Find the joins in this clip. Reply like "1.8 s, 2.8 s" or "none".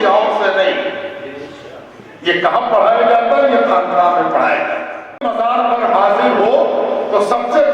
5.2 s